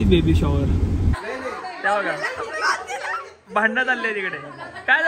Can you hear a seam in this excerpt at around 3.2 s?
no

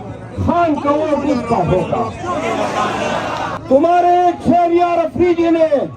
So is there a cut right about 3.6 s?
yes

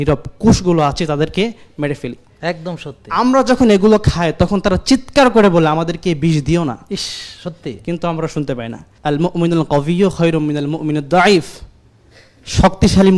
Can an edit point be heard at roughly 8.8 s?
yes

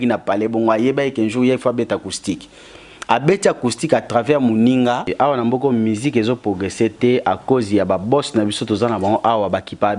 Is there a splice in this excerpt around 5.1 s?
yes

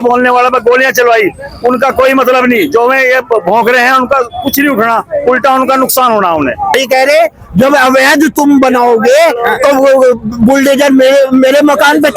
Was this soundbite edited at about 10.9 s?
no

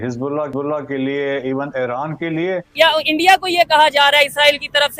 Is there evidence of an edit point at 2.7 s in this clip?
yes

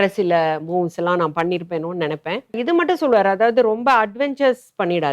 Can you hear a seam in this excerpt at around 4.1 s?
no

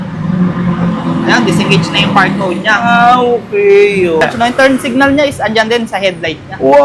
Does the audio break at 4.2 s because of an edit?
yes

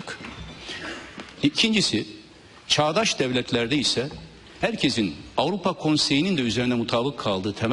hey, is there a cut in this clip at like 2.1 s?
no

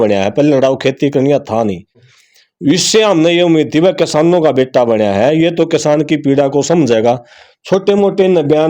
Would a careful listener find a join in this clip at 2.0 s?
no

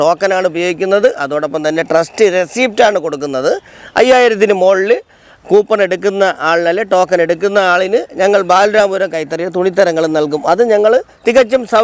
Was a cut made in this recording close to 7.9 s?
no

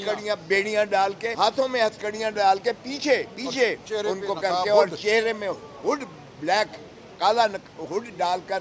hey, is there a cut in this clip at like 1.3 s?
yes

